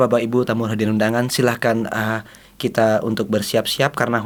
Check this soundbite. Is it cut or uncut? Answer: uncut